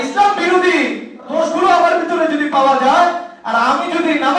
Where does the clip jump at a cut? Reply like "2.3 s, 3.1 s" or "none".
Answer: 1.3 s